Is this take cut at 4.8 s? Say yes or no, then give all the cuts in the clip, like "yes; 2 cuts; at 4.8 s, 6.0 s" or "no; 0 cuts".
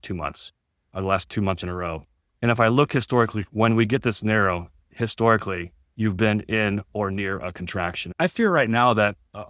no; 3 cuts; at 2.2 s, 3.4 s, 8.0 s